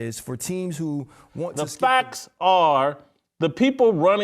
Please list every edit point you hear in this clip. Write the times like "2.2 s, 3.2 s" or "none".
1.7 s